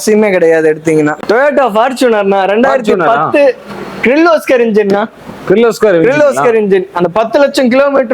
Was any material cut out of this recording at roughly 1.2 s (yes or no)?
yes